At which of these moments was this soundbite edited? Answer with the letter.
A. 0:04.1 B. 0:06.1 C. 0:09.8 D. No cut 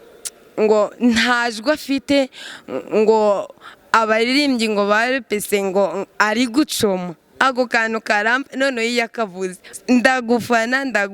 C